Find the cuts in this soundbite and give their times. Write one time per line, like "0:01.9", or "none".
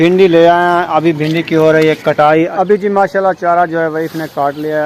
0:02.6